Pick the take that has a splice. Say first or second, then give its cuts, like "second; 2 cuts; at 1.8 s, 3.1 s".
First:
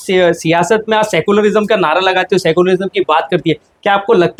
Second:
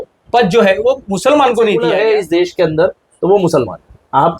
second; 1 cut; at 1.8 s